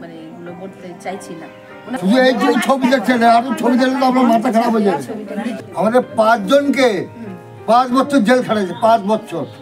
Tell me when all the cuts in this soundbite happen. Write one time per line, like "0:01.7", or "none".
0:02.0
0:05.5